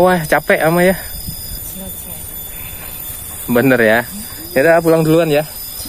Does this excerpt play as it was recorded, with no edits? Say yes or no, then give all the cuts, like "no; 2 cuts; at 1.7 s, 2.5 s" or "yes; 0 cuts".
no; 1 cut; at 1.6 s